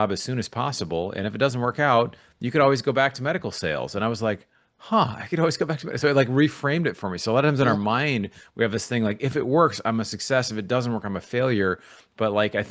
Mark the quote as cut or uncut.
uncut